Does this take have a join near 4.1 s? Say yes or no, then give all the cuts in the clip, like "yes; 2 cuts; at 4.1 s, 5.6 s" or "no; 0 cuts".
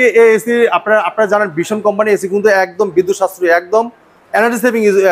no; 0 cuts